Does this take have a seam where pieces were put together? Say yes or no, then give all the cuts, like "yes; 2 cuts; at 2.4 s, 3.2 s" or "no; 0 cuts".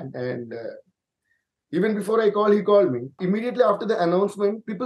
yes; 1 cut; at 3.2 s